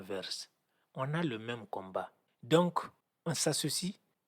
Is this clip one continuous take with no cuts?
no; 1 cut; at 2.2 s

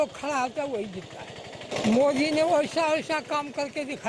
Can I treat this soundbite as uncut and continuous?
no; 1 cut; at 1.7 s

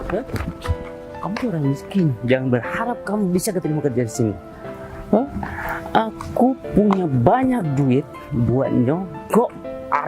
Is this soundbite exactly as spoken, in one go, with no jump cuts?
yes; 0 cuts

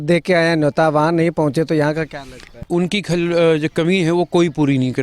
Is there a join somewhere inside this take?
yes; 1 cut; at 2.6 s

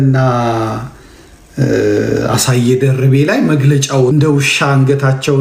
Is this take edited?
yes; 1 cut; at 4.1 s

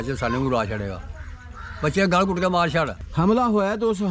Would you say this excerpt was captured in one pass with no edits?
no; 1 cut; at 3.0 s

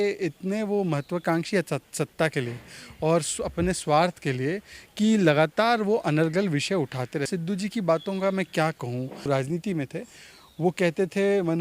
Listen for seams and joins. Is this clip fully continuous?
no; 2 cuts; at 7.3 s, 9.2 s

